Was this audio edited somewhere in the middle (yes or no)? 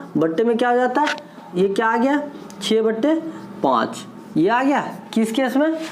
yes